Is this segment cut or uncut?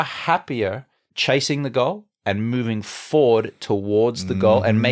uncut